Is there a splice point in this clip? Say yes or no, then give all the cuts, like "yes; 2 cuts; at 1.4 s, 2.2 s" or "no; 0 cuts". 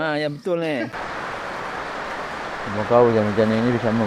yes; 1 cut; at 0.9 s